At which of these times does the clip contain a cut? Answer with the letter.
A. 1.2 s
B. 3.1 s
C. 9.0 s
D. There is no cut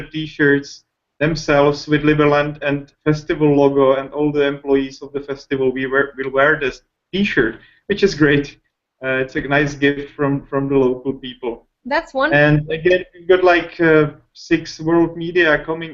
A